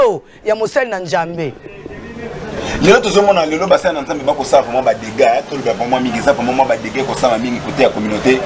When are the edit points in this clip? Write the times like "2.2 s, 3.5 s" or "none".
none